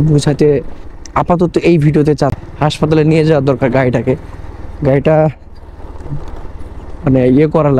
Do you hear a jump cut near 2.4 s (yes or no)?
yes